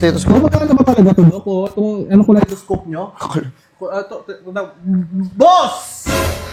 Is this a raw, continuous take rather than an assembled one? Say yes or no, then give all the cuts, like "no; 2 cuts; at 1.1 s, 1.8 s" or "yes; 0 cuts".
yes; 0 cuts